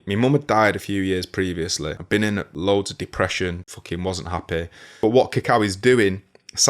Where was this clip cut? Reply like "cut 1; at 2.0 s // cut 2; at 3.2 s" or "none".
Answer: cut 1; at 2.1 s // cut 2; at 3.7 s // cut 3; at 4.8 s